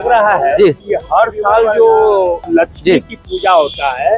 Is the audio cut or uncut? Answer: cut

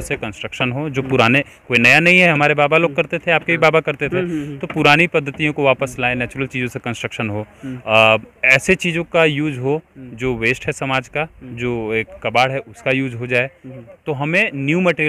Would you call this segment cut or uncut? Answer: uncut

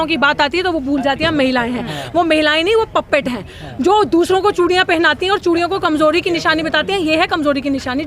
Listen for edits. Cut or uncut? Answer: uncut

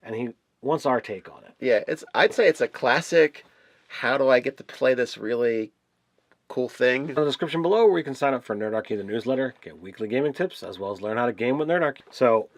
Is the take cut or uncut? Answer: uncut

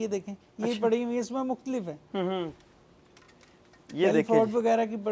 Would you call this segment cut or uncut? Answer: uncut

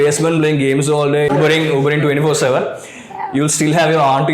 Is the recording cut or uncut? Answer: cut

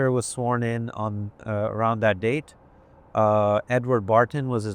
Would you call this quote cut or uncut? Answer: uncut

